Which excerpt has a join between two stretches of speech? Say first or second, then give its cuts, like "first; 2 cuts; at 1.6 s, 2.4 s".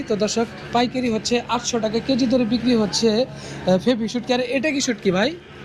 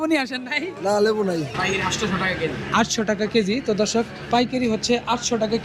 second; 1 cut; at 1.5 s